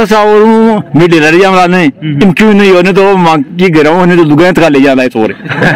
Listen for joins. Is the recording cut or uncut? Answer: uncut